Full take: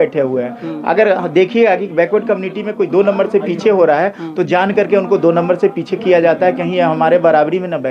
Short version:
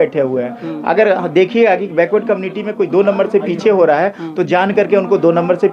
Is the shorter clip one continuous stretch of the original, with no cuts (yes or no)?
yes